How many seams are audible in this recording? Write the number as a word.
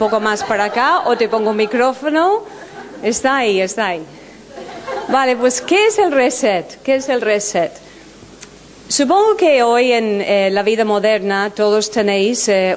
zero